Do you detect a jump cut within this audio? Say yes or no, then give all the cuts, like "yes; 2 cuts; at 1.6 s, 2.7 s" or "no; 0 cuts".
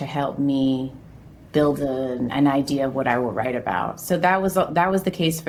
no; 0 cuts